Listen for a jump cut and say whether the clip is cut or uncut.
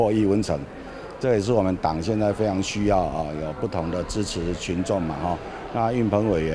uncut